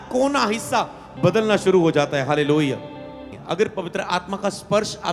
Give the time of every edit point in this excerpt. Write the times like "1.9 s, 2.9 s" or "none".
3.4 s